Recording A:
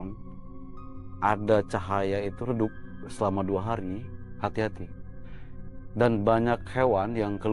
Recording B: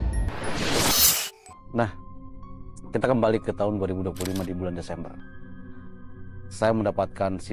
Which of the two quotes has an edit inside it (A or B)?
B